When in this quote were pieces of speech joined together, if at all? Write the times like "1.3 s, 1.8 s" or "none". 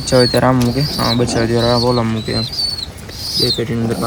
none